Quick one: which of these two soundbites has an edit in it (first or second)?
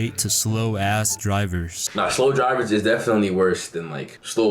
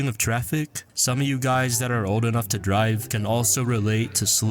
first